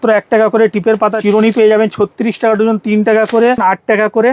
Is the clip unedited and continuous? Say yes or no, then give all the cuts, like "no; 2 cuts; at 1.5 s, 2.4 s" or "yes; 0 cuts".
no; 2 cuts; at 1.2 s, 3.6 s